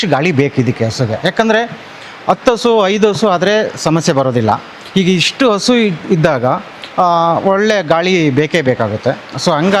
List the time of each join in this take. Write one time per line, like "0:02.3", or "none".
none